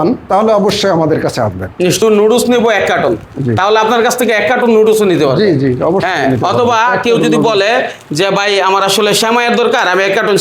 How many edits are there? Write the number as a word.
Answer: one